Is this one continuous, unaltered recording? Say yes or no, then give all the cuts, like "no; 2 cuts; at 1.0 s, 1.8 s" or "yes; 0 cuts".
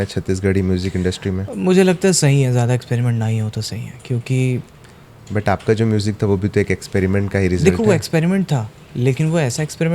yes; 0 cuts